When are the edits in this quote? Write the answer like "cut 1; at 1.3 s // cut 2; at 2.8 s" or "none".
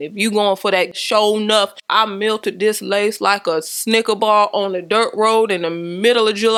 none

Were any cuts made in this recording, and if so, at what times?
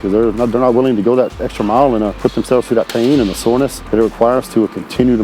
cut 1; at 2.1 s // cut 2; at 3.8 s

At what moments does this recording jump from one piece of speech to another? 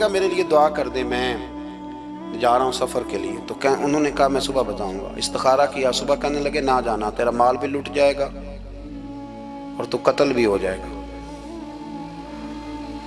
none

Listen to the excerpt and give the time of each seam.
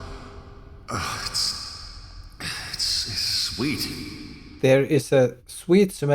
cut 1; at 4.4 s

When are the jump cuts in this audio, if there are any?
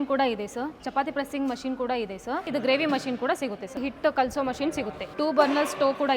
cut 1; at 2.5 s // cut 2; at 3.8 s // cut 3; at 5.0 s

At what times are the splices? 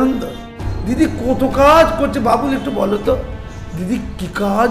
cut 1; at 1.0 s

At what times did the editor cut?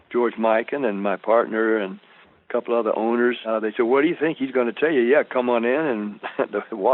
cut 1; at 3.4 s

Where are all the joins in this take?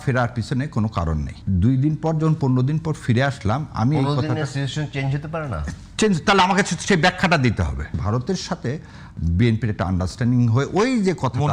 cut 1; at 1.3 s // cut 2; at 8.0 s

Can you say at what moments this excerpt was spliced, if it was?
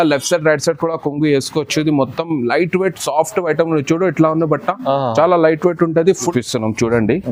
cut 1; at 6.3 s

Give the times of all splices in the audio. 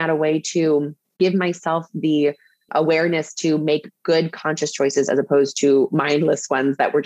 cut 1; at 1.2 s

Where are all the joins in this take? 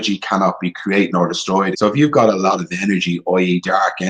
cut 1; at 1.7 s

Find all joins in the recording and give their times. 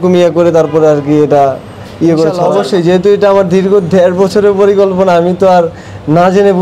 cut 1; at 2.4 s

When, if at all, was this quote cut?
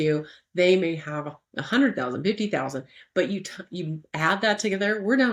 none

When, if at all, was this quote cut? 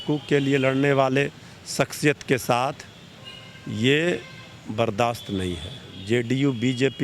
cut 1; at 5.9 s

